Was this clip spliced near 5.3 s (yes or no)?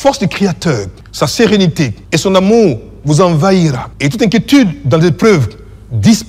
no